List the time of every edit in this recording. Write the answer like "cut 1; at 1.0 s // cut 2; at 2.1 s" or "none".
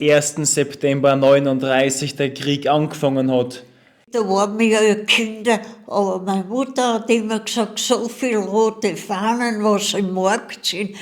cut 1; at 4.1 s